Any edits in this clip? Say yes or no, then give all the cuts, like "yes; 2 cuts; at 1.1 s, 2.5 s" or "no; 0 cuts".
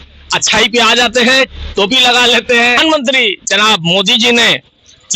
yes; 1 cut; at 2.8 s